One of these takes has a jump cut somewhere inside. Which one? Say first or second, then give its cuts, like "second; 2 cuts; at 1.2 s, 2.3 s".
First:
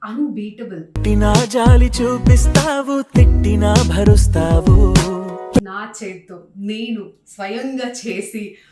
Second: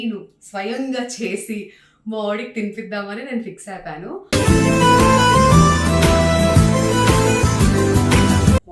first; 1 cut; at 5.7 s